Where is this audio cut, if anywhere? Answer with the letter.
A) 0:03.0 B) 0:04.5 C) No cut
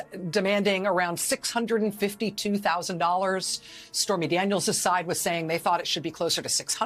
C